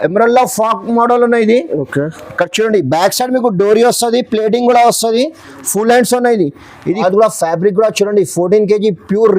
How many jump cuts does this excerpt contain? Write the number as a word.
one